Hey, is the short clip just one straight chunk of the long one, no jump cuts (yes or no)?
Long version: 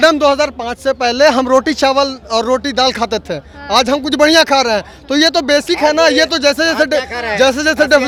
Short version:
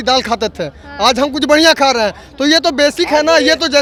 yes